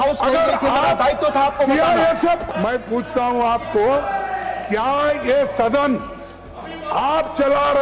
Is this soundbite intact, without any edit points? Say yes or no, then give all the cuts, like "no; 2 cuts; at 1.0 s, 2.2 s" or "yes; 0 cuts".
no; 1 cut; at 2.4 s